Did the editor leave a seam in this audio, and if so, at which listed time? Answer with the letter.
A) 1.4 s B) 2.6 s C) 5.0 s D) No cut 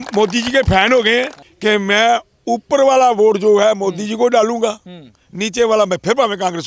A